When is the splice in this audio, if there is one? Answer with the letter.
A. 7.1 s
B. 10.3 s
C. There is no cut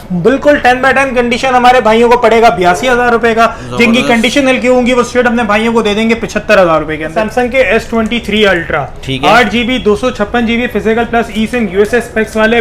A